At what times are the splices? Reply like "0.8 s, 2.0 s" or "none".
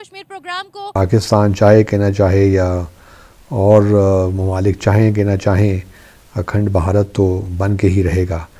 1.0 s